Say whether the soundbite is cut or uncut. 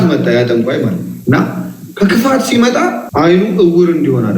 cut